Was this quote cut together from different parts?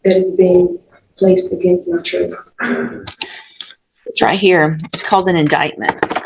no; 0 cuts

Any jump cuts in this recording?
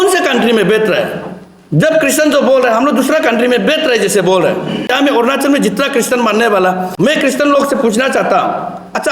yes; 2 cuts; at 4.9 s, 6.9 s

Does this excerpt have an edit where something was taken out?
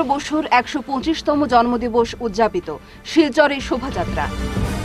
no; 0 cuts

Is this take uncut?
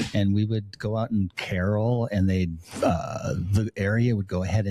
yes; 0 cuts

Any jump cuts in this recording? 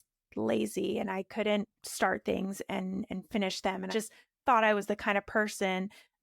yes; 1 cut; at 3.9 s

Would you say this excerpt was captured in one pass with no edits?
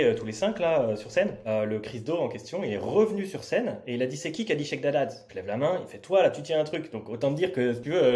no; 2 cuts; at 1.4 s, 5.3 s

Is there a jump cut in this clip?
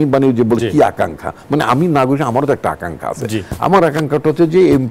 no; 0 cuts

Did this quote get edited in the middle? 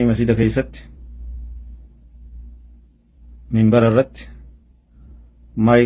no; 0 cuts

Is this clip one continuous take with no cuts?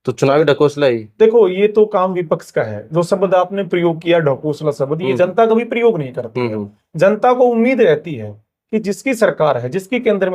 yes; 0 cuts

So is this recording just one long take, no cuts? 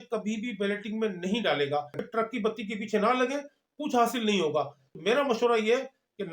no; 2 cuts; at 2.0 s, 4.8 s

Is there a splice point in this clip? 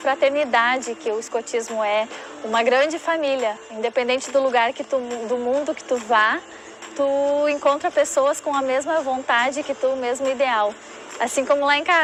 no; 0 cuts

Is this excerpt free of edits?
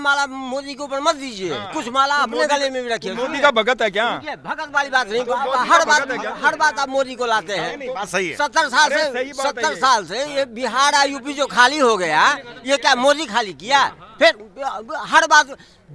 yes; 0 cuts

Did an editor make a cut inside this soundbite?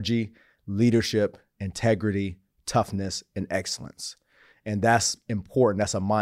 no; 0 cuts

